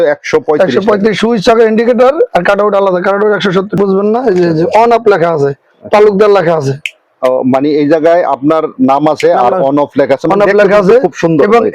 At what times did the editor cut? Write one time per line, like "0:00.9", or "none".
0:03.8